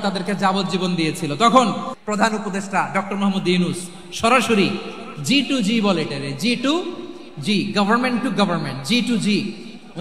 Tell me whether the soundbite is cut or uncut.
cut